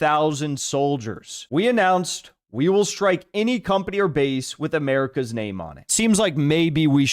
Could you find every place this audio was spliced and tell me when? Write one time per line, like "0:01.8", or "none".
0:01.4
0:05.9

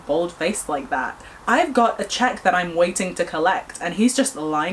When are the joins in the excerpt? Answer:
none

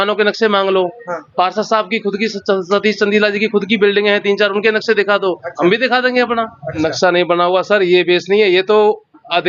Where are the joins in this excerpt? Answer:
0:06.8

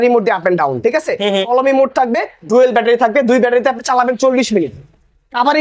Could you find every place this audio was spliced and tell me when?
none

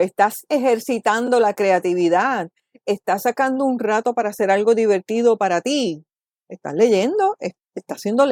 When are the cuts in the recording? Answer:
none

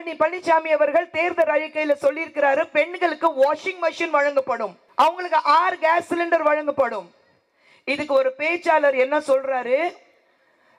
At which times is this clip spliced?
0:04.8

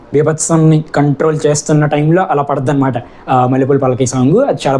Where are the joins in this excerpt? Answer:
none

